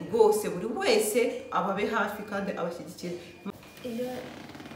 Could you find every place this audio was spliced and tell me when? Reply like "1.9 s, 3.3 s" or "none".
3.4 s